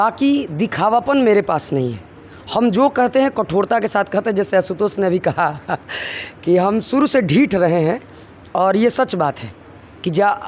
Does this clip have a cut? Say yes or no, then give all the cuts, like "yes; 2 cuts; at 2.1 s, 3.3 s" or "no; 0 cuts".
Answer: no; 0 cuts